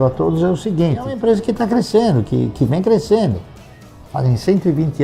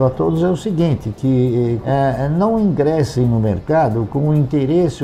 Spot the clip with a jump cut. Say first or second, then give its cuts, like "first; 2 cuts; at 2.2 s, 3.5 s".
first; 1 cut; at 1.1 s